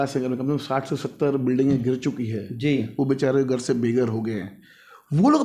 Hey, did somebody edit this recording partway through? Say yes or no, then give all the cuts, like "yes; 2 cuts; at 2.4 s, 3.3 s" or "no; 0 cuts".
no; 0 cuts